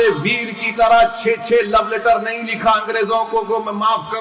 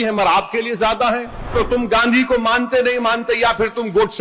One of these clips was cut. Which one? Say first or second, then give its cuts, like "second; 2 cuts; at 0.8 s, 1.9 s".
second; 1 cut; at 1.5 s